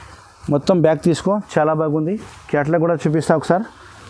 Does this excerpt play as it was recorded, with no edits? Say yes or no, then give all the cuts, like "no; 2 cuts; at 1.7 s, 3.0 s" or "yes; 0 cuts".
yes; 0 cuts